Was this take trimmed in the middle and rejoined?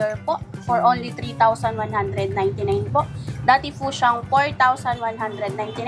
no; 0 cuts

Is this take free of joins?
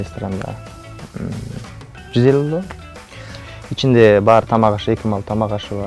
yes; 0 cuts

